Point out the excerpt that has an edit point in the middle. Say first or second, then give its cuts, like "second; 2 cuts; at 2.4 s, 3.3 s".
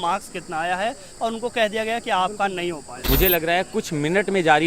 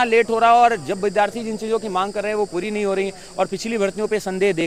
first; 1 cut; at 2.9 s